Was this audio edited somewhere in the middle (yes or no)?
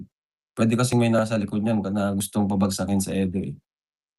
no